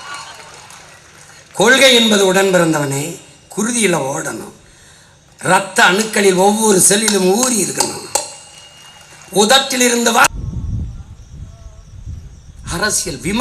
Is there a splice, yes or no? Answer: yes